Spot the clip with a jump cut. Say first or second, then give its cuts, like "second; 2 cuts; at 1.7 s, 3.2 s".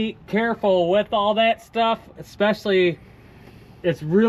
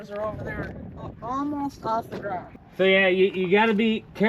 second; 1 cut; at 2.5 s